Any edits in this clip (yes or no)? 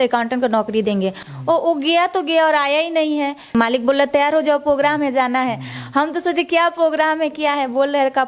yes